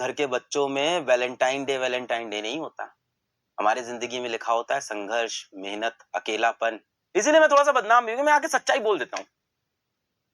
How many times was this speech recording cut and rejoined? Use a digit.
1